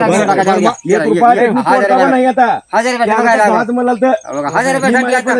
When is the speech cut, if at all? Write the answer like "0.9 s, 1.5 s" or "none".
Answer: none